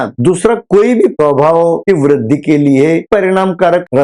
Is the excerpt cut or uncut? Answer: uncut